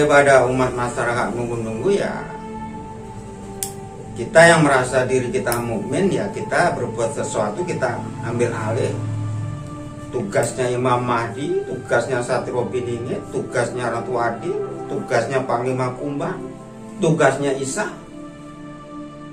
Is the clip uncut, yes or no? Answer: yes